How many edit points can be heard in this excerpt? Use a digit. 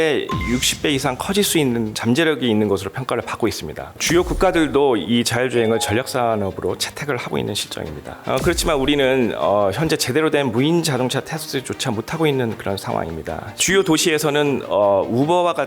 4